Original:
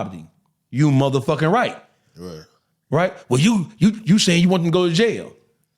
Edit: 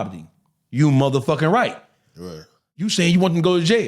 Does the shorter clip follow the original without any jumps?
no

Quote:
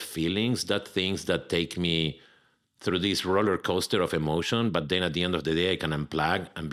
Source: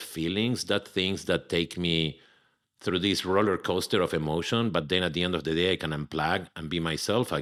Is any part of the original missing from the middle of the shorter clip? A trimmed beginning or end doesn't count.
no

